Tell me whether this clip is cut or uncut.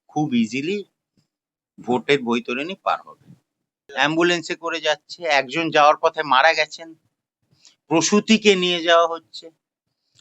cut